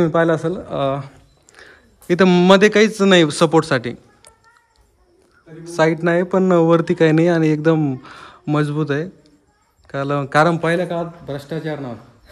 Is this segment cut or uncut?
uncut